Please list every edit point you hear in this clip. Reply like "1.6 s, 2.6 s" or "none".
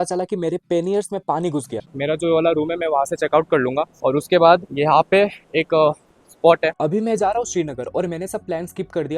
1.9 s, 6.8 s